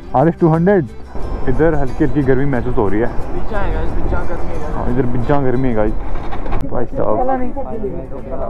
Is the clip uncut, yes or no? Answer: no